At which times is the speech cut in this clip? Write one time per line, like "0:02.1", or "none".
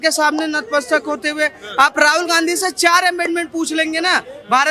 none